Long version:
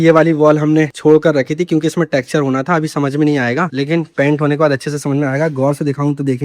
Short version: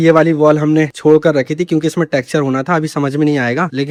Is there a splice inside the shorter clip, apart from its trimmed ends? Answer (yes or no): no